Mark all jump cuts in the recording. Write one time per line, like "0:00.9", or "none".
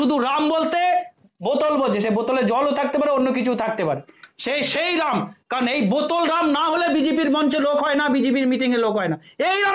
none

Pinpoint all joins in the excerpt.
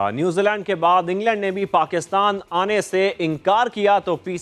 none

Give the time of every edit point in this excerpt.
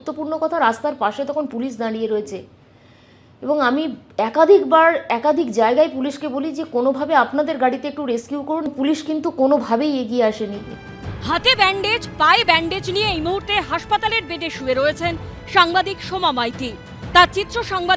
none

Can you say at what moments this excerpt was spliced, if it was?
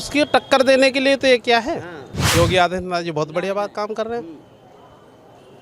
0:02.2

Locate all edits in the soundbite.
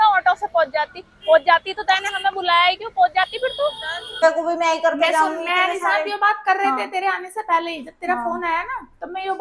0:04.2

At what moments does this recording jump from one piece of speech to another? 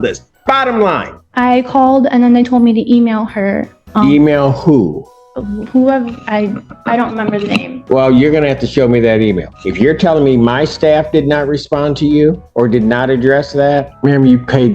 0:01.2
0:09.5
0:12.4
0:13.9

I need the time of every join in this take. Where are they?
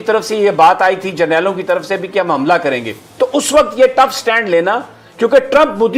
none

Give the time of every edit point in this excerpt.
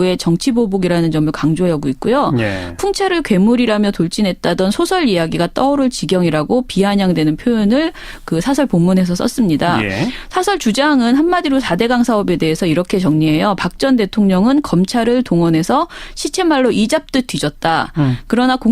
0:05.8

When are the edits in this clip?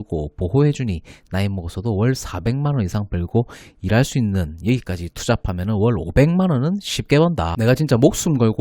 0:07.5

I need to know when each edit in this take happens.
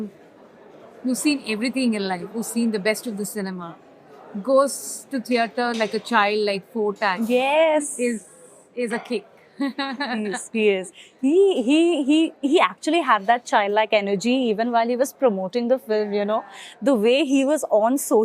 none

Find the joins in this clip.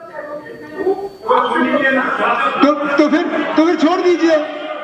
none

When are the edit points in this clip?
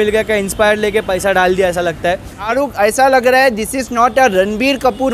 0:02.5

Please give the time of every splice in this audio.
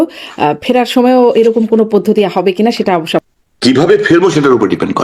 0:03.2

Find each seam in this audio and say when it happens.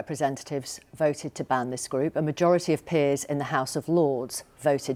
none

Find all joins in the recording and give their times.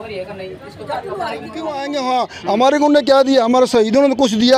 0:01.8

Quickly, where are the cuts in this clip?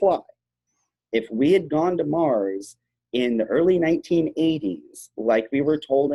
none

